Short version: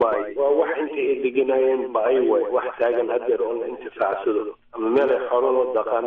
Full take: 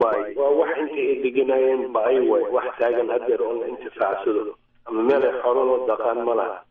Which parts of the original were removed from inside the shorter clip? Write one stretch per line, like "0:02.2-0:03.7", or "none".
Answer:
0:04.6-0:04.7